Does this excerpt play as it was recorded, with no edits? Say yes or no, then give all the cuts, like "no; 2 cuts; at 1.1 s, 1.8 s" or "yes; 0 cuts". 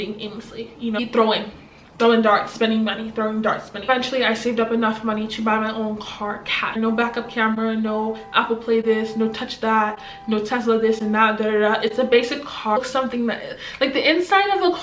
no; 4 cuts; at 1.0 s, 3.9 s, 6.7 s, 12.8 s